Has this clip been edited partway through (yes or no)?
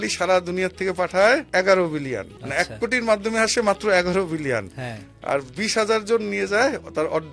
yes